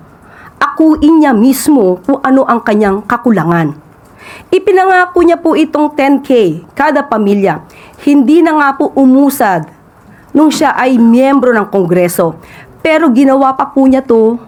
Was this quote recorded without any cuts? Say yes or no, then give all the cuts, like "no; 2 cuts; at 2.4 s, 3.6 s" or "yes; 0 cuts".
yes; 0 cuts